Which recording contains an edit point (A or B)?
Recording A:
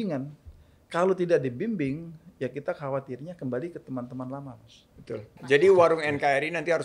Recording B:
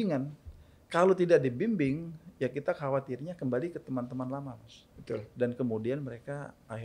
A